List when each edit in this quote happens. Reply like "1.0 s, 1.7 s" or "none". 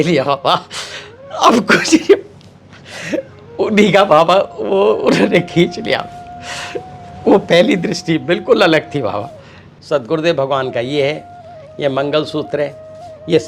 9.7 s